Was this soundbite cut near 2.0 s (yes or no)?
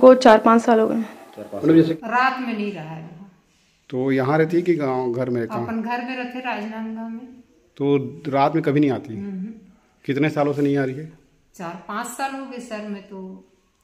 yes